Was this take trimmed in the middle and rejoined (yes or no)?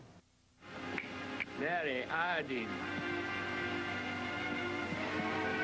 no